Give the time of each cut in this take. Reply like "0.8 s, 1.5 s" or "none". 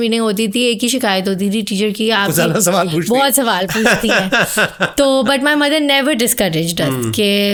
none